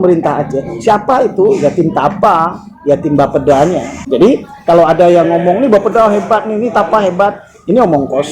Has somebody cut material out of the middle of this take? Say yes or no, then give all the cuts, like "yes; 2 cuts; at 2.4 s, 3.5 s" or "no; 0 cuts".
yes; 1 cut; at 3.9 s